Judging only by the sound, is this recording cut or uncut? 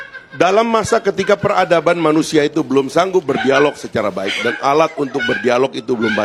uncut